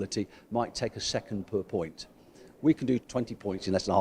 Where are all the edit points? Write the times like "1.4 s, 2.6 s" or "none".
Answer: 3.0 s